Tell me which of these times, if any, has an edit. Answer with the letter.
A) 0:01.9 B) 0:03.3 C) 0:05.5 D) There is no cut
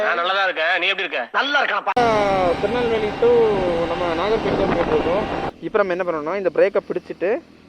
C